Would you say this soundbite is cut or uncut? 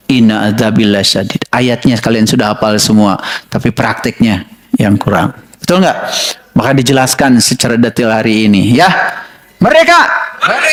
uncut